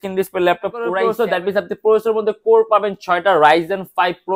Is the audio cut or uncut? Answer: cut